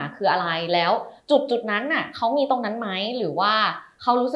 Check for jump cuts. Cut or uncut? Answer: uncut